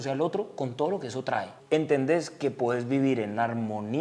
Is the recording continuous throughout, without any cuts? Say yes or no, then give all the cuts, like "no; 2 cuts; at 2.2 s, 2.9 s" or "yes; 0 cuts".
no; 1 cut; at 1.5 s